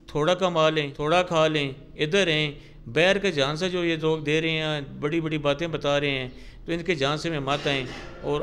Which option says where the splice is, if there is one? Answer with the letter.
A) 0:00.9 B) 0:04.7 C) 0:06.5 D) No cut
A